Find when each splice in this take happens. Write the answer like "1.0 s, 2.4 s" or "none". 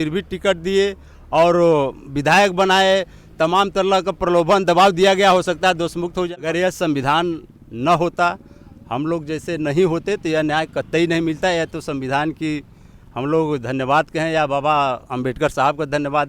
6.3 s